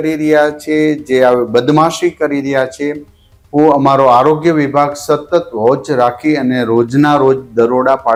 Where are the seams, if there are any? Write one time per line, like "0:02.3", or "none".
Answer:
none